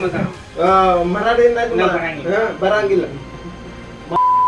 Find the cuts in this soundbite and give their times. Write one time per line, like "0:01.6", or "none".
0:03.2